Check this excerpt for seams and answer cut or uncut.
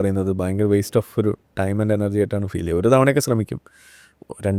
uncut